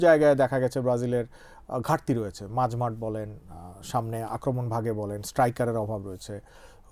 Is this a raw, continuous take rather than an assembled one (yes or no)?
yes